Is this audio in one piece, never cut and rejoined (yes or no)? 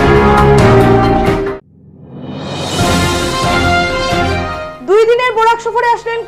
no